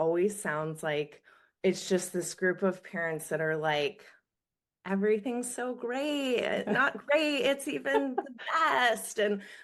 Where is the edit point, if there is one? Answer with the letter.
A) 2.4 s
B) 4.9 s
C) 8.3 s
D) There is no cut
D